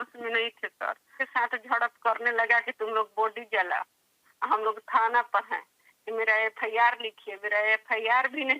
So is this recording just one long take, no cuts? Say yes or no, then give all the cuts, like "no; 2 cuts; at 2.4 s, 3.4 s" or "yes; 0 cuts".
no; 1 cut; at 1.2 s